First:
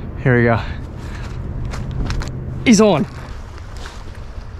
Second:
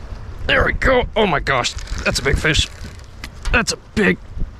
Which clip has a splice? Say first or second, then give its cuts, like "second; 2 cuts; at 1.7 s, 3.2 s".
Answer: first; 2 cuts; at 2.2 s, 3.2 s